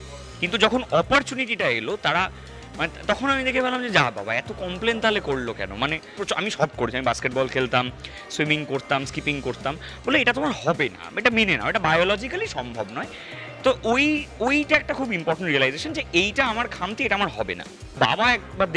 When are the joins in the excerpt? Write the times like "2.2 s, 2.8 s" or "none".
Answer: 6.2 s, 17.9 s